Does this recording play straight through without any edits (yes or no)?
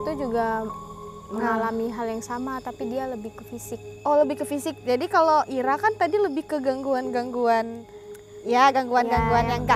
yes